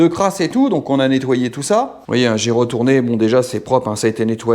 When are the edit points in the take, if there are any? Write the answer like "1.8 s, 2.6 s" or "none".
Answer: 2.0 s